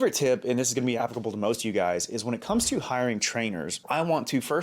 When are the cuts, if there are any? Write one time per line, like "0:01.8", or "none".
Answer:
0:01.0